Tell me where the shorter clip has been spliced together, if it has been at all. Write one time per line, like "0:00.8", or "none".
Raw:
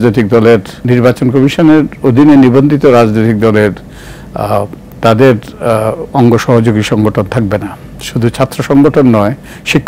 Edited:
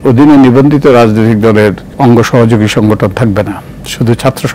0:01.9